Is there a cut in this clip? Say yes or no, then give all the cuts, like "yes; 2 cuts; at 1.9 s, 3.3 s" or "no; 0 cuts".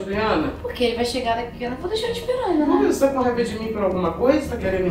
no; 0 cuts